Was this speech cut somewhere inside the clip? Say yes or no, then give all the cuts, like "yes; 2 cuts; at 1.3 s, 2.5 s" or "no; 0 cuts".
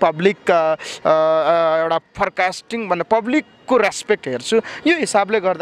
no; 0 cuts